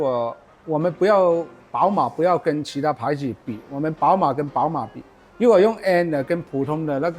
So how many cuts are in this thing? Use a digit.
1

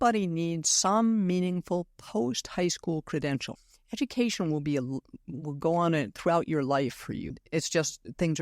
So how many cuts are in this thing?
2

